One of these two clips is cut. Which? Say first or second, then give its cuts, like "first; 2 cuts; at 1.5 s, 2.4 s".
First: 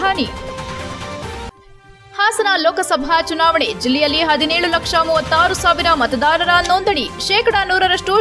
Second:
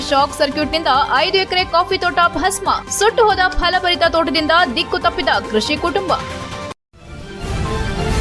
second; 1 cut; at 6.9 s